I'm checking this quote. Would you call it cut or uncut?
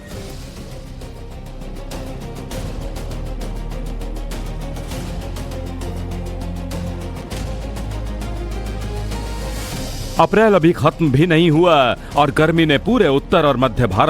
cut